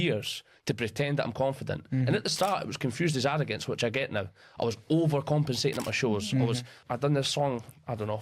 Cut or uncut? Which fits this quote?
cut